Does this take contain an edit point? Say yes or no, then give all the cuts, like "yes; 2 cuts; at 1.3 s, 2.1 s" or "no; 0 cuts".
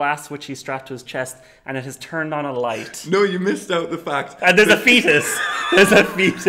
no; 0 cuts